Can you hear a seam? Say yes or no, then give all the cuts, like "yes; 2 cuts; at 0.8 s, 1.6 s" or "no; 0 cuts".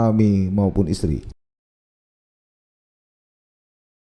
no; 0 cuts